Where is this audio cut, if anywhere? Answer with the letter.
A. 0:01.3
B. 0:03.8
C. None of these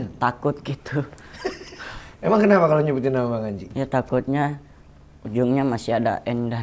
B